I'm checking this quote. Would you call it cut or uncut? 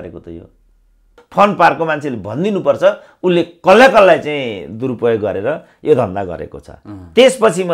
cut